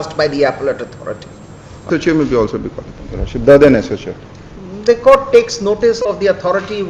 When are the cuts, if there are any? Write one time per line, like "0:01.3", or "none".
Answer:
0:01.9